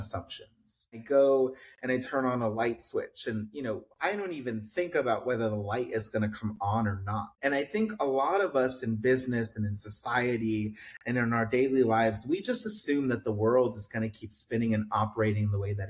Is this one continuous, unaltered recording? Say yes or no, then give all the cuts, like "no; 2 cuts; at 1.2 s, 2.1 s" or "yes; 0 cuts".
no; 2 cuts; at 1.0 s, 7.3 s